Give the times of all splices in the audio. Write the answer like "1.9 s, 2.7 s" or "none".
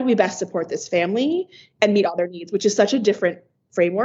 none